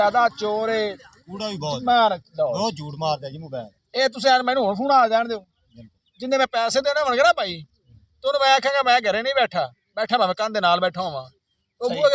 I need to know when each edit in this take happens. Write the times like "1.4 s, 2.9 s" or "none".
none